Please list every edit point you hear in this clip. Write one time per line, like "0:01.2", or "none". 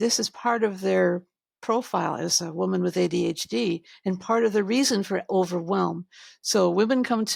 none